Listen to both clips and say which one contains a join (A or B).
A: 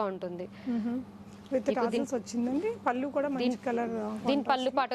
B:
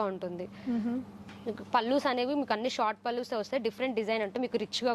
B